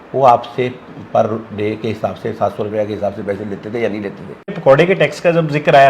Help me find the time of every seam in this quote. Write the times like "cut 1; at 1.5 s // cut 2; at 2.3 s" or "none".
cut 1; at 4.6 s